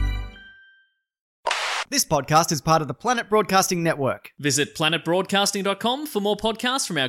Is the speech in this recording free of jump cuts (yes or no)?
no